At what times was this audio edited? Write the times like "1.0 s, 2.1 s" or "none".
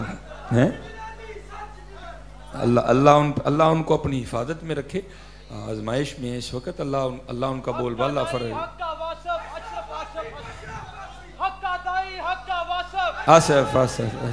none